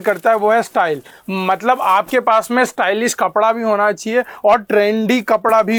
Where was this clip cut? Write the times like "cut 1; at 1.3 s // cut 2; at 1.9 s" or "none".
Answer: none